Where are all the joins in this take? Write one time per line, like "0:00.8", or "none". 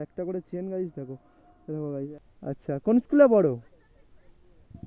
0:02.1